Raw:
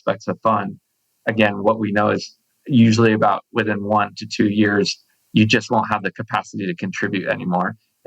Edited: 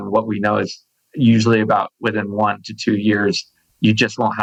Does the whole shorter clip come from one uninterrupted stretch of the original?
yes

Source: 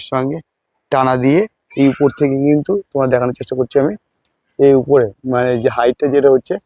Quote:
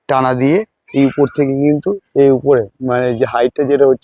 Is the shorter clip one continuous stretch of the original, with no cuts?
no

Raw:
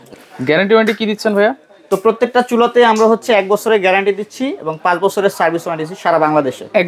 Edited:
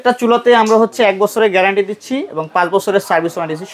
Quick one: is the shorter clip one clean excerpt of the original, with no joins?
yes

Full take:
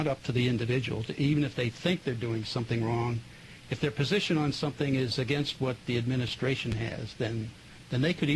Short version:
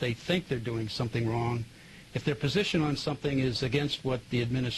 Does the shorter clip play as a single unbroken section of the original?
yes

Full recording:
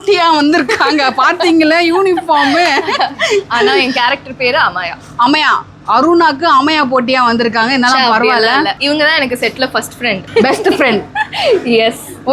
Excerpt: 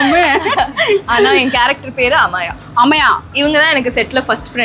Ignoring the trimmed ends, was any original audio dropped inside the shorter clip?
yes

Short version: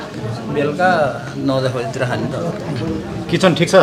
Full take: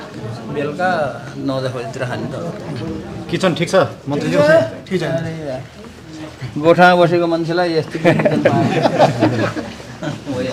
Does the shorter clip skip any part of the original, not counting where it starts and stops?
no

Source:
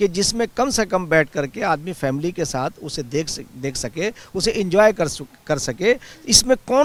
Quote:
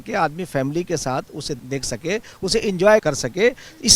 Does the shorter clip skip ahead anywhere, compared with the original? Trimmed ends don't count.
yes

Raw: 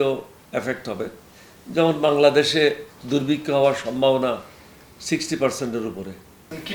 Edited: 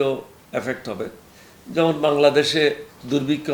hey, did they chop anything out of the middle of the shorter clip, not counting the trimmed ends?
no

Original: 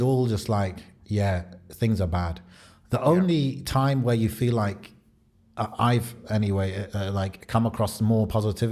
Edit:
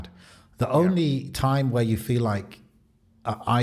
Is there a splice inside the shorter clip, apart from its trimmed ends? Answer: no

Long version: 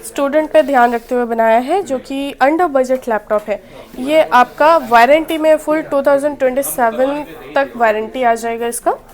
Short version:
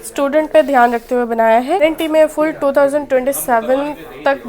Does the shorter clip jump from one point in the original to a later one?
yes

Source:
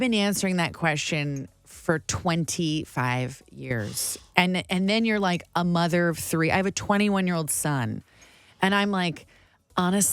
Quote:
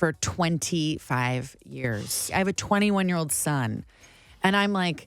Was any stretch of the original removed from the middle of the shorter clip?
yes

